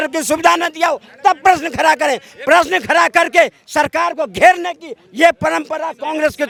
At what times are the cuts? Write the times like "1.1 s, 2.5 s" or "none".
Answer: none